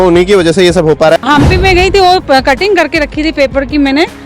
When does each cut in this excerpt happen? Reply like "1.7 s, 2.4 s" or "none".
1.2 s